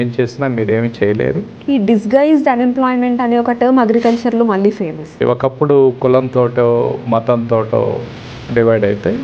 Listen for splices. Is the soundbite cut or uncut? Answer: cut